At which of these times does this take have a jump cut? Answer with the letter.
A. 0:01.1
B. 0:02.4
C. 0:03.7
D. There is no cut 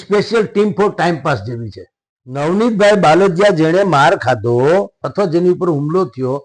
B